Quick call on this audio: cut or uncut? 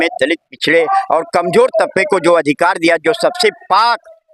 uncut